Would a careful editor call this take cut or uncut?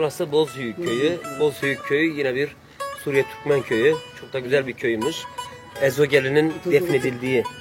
cut